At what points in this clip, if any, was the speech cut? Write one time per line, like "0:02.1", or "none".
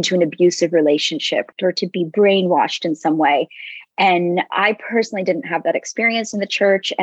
0:01.5